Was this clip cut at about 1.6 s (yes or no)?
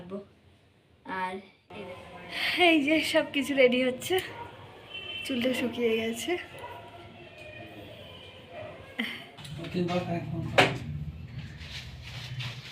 yes